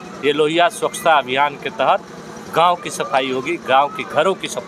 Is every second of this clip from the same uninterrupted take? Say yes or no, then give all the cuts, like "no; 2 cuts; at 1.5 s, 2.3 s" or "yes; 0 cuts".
yes; 0 cuts